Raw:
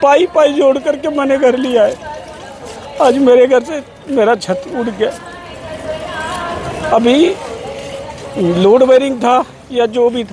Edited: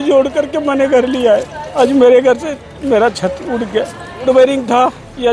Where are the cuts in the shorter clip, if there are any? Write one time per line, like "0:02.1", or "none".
0:01.6
0:04.2